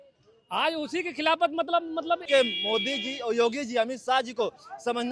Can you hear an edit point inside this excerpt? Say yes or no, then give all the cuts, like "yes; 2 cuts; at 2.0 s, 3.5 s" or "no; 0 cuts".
yes; 1 cut; at 2.2 s